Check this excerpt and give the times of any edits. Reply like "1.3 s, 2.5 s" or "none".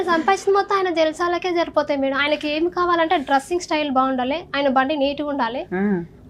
none